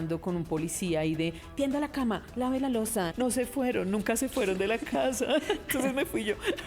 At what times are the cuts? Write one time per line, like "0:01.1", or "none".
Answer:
0:03.1